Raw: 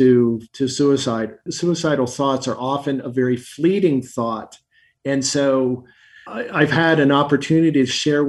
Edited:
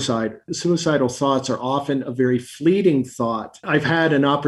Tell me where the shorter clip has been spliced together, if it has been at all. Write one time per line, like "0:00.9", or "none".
0:03.5